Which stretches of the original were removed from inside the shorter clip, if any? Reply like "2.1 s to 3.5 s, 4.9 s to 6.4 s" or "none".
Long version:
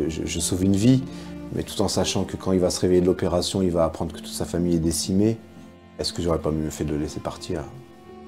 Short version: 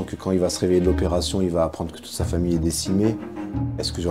none